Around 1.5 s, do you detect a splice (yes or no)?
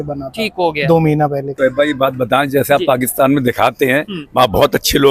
yes